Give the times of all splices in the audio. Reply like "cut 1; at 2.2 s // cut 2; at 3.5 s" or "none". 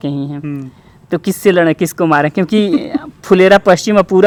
none